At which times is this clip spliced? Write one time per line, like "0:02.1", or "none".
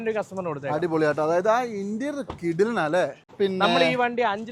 0:03.2